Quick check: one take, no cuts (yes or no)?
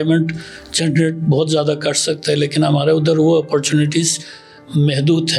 yes